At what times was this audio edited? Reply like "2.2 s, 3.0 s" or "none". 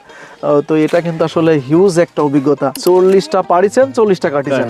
2.7 s